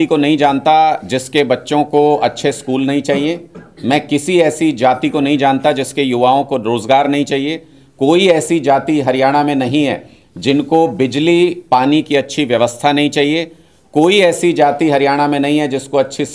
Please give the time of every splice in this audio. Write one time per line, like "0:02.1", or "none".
none